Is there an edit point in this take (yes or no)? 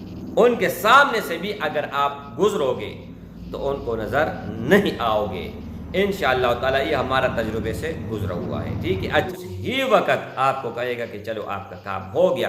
yes